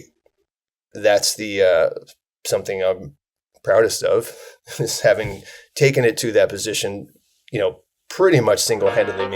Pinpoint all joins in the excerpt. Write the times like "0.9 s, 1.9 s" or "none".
none